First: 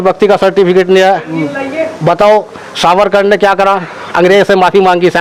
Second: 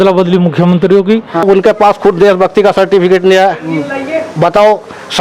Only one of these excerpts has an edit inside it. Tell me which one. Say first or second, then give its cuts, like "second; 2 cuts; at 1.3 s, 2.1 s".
second; 1 cut; at 1.4 s